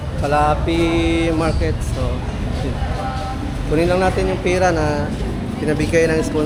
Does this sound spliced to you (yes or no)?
no